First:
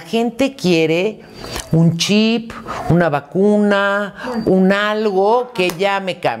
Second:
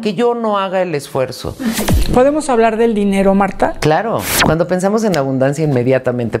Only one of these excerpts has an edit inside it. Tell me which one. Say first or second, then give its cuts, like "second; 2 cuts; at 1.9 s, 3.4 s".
second; 2 cuts; at 1.9 s, 4.3 s